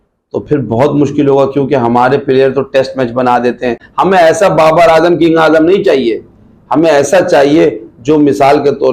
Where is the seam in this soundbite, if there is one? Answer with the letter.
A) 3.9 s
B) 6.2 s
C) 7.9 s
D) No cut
A